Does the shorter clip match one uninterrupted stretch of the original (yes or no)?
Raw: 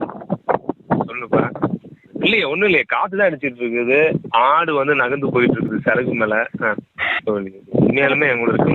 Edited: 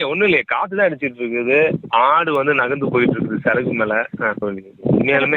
no